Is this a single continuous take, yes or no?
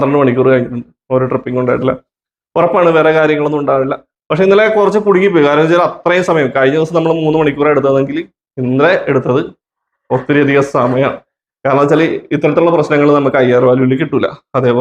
yes